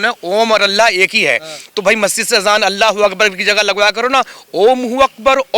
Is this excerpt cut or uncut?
uncut